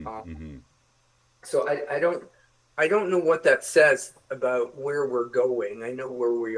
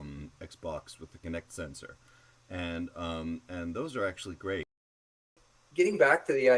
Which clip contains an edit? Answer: second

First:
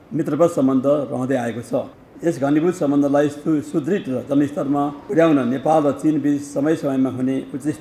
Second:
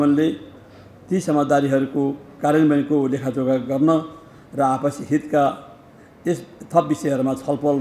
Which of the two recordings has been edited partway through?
first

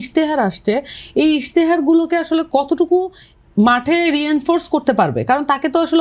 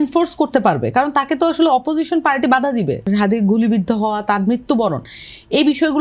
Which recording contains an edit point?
second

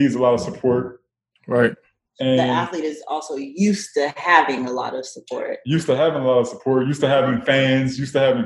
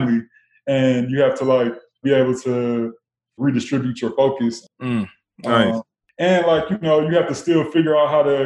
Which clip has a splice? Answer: second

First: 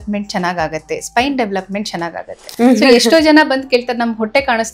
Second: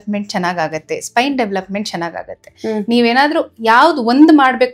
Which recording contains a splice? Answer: first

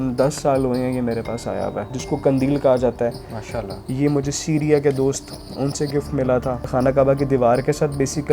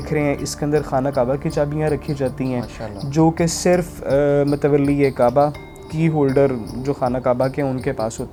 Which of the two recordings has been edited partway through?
first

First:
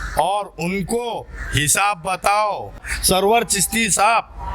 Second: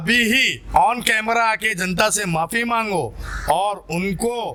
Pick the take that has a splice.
first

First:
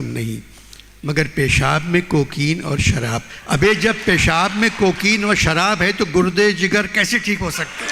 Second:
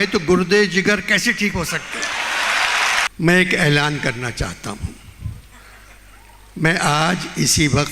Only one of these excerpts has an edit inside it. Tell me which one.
second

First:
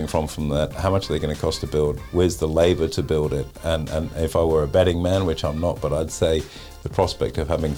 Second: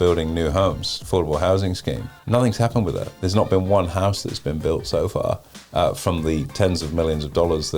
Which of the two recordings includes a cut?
second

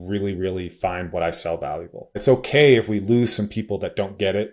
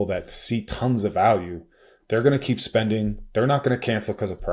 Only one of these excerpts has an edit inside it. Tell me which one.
first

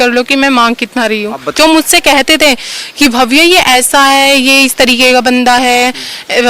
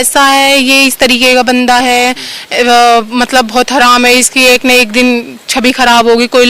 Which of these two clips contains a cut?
first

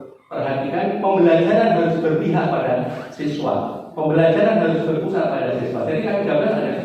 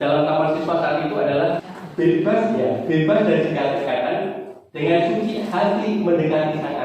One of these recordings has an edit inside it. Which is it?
second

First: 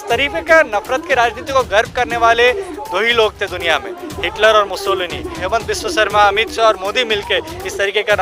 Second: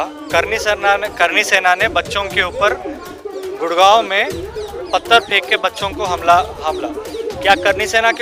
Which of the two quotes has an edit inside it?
first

